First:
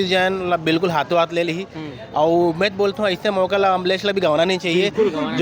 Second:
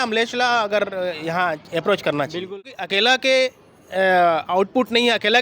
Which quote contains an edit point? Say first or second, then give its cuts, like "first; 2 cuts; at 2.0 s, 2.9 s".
second; 1 cut; at 2.5 s